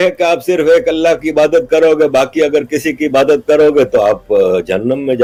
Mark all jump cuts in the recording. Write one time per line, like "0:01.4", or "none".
none